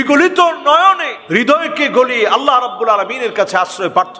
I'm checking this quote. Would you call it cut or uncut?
cut